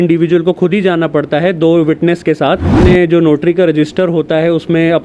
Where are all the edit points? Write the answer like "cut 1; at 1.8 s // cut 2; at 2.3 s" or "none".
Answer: cut 1; at 2.7 s